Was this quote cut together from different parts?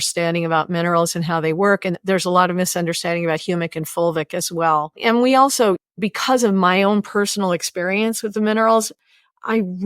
yes; 1 cut; at 1.9 s

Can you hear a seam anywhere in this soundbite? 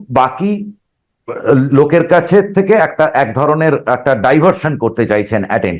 no; 0 cuts

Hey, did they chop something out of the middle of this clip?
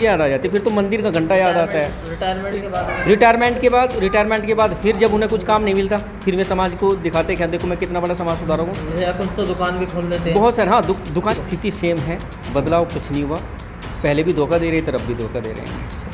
yes; 1 cut; at 11.3 s

